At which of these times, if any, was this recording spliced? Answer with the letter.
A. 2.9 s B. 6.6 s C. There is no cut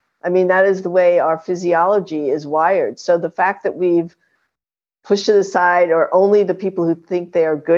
C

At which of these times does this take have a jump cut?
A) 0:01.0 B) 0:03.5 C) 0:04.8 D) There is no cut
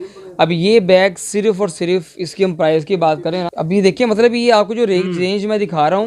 B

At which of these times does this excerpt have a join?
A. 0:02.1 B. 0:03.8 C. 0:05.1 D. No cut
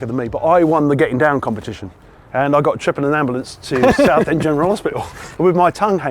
D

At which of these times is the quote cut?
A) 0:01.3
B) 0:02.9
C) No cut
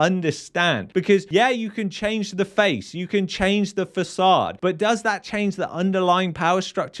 A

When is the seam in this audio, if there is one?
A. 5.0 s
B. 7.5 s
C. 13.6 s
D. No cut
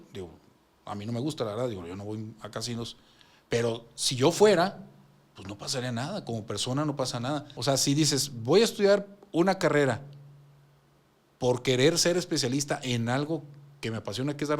B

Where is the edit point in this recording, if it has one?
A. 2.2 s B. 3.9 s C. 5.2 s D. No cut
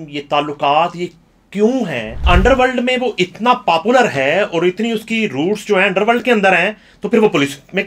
A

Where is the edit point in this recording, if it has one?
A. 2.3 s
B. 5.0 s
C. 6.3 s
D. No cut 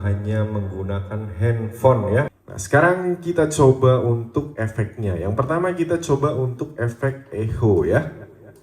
A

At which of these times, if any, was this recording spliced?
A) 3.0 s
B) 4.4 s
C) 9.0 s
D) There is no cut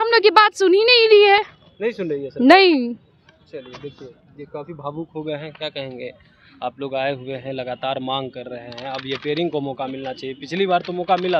D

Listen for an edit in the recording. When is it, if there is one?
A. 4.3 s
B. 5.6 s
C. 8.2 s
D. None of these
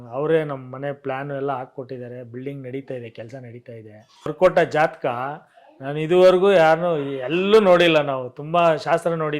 A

